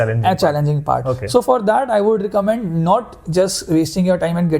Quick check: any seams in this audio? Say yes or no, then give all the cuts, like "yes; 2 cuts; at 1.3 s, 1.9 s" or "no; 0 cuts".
no; 0 cuts